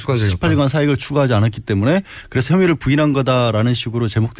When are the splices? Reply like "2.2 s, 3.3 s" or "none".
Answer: none